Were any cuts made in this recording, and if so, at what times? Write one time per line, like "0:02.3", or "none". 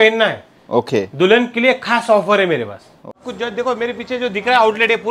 0:03.1